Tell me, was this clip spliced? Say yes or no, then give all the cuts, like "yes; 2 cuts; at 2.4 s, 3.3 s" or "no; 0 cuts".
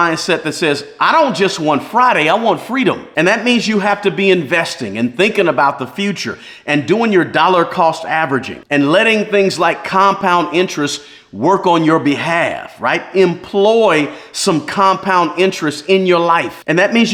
no; 0 cuts